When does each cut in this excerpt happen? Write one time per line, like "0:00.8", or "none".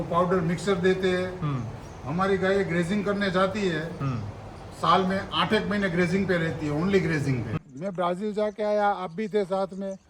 0:07.5